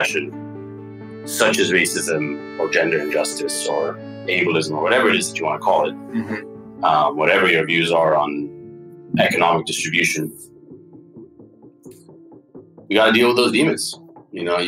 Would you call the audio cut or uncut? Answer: uncut